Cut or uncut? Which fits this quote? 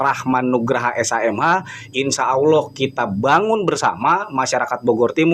uncut